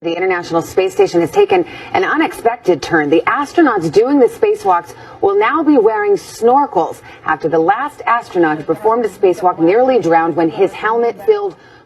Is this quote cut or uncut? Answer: uncut